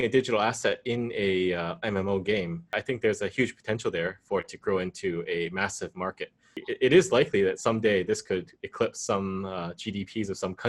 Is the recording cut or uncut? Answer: cut